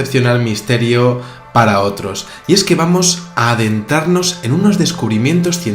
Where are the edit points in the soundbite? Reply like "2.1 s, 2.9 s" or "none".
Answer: 3.9 s